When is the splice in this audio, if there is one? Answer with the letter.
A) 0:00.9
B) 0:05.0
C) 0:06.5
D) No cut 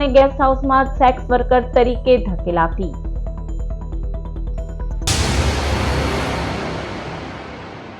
B